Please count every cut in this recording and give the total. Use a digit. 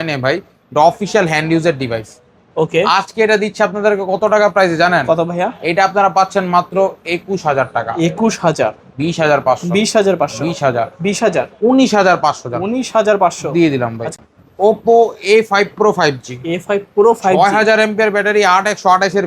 1